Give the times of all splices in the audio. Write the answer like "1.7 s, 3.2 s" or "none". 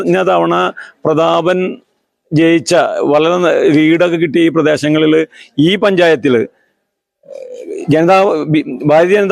none